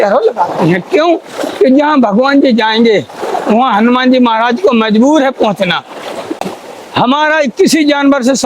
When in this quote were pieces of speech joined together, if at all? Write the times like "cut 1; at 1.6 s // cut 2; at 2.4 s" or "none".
cut 1; at 6.3 s